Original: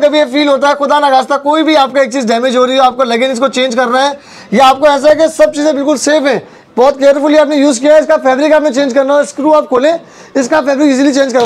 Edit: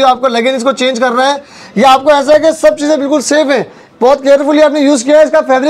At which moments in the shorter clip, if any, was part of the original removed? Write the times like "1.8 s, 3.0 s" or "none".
none